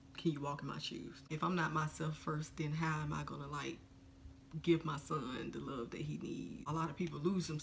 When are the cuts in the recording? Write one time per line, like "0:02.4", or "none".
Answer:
0:01.3
0:06.7